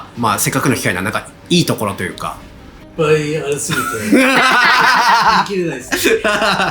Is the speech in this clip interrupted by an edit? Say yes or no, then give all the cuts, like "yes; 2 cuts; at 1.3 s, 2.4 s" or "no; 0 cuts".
no; 0 cuts